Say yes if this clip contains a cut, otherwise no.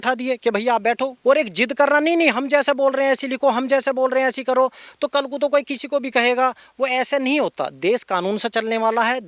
yes